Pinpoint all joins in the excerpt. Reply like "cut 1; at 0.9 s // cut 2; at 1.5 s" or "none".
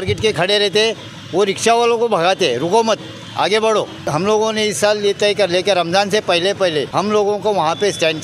cut 1; at 4.0 s // cut 2; at 6.9 s